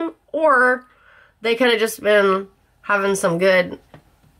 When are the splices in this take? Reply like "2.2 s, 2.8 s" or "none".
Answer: none